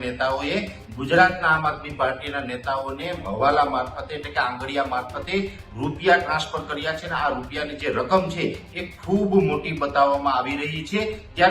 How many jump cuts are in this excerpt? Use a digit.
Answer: 0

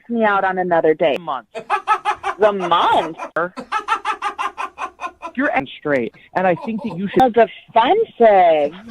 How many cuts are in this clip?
4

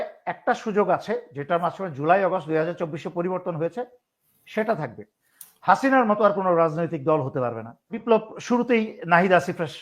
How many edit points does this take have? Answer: 1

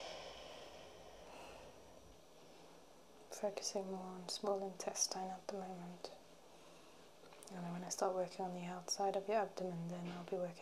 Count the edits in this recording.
1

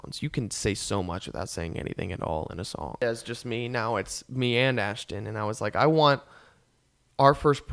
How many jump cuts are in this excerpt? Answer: 1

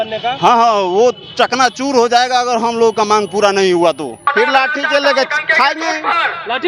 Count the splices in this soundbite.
1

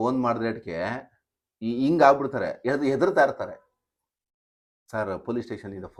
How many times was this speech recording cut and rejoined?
0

